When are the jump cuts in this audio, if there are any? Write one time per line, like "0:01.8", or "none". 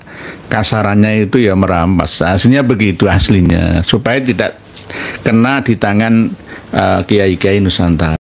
none